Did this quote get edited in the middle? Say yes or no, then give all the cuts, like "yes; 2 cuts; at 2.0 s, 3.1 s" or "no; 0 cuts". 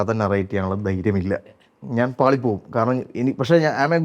no; 0 cuts